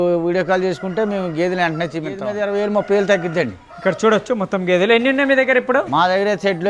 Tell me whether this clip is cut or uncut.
cut